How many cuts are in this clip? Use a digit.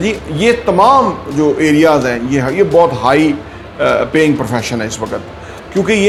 0